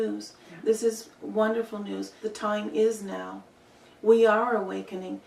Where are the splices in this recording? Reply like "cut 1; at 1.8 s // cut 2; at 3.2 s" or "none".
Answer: cut 1; at 2.2 s